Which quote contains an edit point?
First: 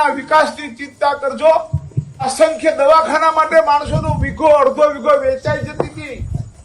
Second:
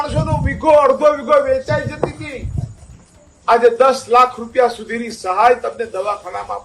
first; 1 cut; at 2.3 s

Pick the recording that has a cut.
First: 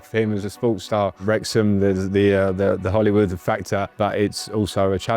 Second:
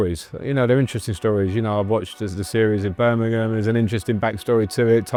first; 2 cuts; at 1.2 s, 3.9 s

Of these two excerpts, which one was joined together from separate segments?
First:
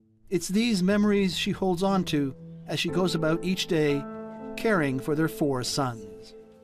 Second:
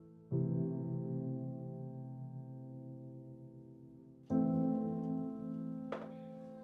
first; 1 cut; at 3.5 s

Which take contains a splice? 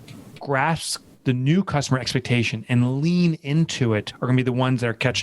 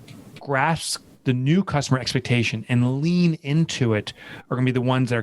first; 1 cut; at 4.1 s

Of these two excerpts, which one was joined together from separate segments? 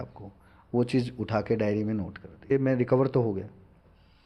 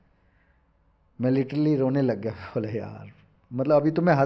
first; 1 cut; at 2.5 s

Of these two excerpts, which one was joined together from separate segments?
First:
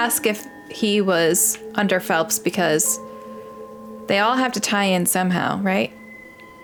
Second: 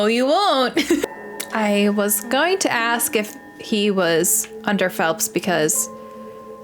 second; 1 cut; at 1.1 s

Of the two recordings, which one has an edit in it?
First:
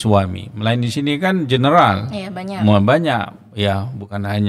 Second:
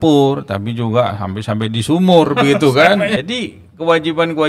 second; 1 cut; at 3.2 s

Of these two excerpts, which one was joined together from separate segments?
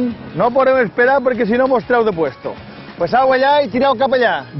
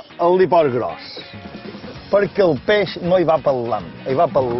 first; 1 cut; at 2.8 s

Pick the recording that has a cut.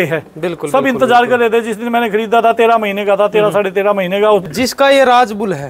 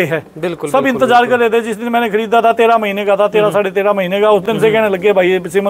first; 1 cut; at 4.5 s

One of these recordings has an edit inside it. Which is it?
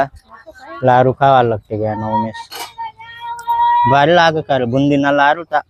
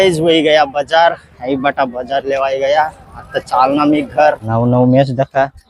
second; 1 cut; at 4.4 s

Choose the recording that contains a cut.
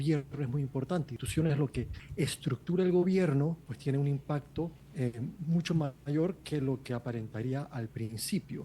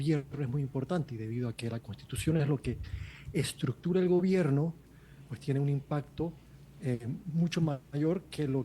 first; 4 cuts; at 1.1 s, 2.0 s, 3.7 s, 4.8 s

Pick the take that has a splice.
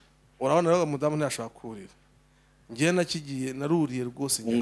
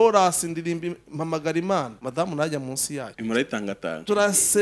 second; 2 cuts; at 2.0 s, 3.1 s

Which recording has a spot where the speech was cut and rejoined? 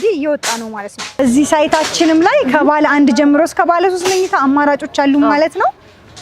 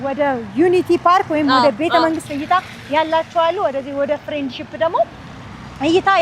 first; 1 cut; at 1.2 s

